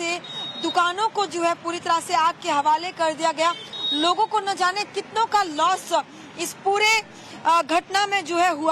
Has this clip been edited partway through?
yes; 1 cut; at 6.9 s

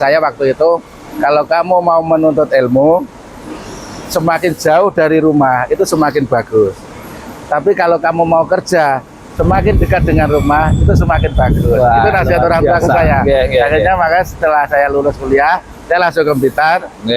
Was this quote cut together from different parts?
no; 0 cuts

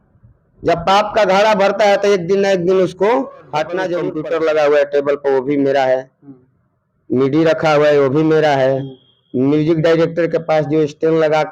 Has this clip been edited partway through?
yes; 1 cut; at 4.1 s

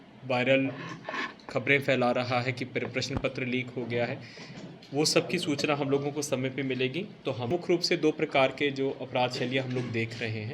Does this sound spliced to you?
yes; 1 cut; at 7.5 s

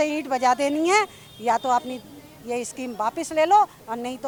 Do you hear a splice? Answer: no; 0 cuts

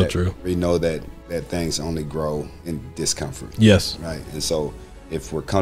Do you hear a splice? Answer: yes; 2 cuts; at 1.1 s, 2.6 s

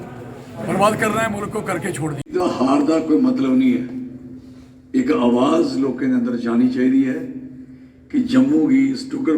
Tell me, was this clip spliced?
yes; 1 cut; at 2.2 s

